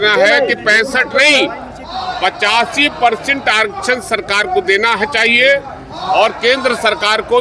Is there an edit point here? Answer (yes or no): no